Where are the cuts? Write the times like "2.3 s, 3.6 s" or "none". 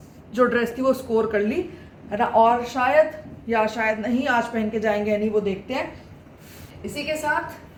none